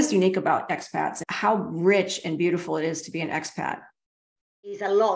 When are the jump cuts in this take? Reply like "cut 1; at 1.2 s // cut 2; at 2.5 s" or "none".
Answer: cut 1; at 1.2 s // cut 2; at 4.5 s

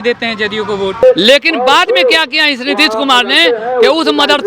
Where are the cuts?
cut 1; at 1.0 s

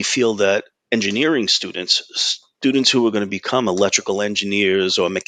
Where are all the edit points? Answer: none

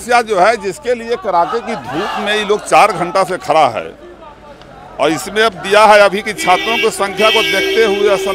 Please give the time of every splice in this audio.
none

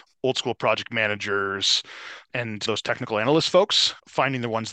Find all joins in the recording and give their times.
none

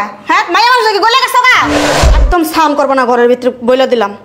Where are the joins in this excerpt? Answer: cut 1; at 1.8 s

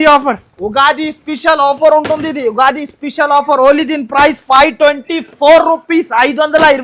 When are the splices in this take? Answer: none

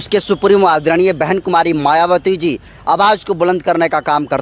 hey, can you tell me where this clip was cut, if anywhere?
none

